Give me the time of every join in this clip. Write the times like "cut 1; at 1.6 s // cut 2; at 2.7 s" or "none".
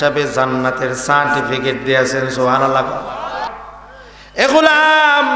cut 1; at 3.5 s

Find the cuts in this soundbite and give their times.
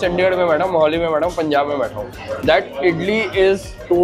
cut 1; at 2.1 s

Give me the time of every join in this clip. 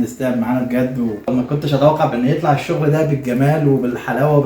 cut 1; at 1.3 s

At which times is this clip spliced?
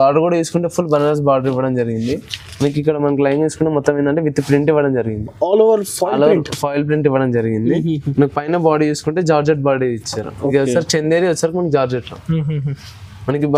none

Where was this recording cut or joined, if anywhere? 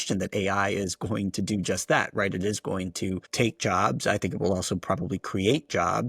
cut 1; at 3.3 s

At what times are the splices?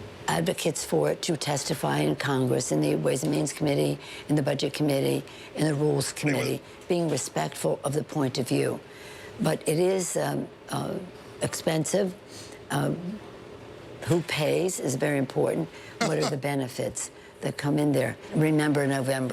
cut 1; at 18.3 s

